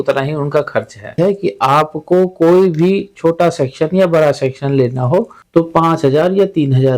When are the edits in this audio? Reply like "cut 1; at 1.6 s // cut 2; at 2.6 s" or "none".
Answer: cut 1; at 1.1 s // cut 2; at 5.4 s